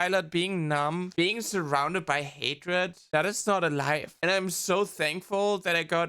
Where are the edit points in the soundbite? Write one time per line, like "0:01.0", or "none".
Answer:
none

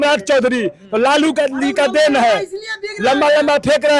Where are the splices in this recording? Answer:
none

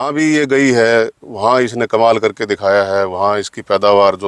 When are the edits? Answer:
none

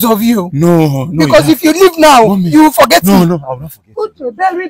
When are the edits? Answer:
none

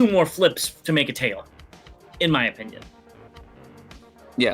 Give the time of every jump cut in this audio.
none

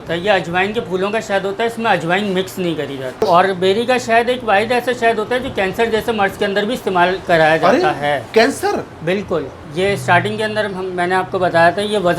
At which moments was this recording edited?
0:03.2
0:09.6

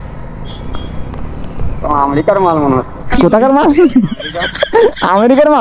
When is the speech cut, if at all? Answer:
0:03.0

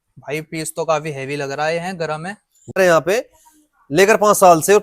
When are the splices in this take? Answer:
0:02.6

